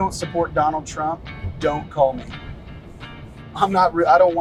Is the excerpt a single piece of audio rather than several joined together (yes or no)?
yes